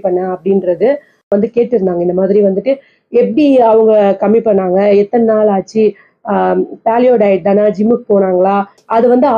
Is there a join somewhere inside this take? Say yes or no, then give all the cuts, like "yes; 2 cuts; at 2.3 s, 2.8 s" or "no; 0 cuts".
yes; 1 cut; at 1.3 s